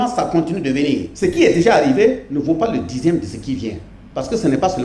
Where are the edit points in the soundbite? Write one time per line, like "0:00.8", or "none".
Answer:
0:01.1
0:02.3